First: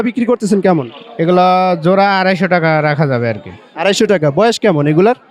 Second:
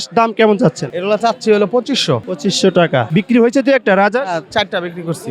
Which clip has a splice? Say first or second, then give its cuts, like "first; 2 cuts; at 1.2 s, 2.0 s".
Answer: second; 3 cuts; at 0.9 s, 2.3 s, 3.1 s